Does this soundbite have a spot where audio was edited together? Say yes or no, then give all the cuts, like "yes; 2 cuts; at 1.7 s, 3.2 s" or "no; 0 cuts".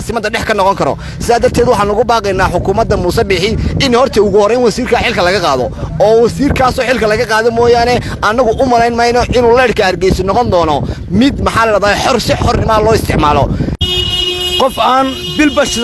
yes; 1 cut; at 13.8 s